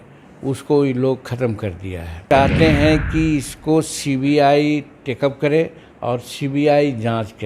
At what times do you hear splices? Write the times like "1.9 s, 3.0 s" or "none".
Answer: 2.2 s